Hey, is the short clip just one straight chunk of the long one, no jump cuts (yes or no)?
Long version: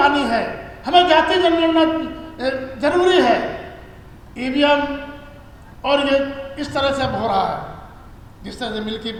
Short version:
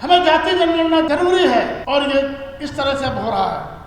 no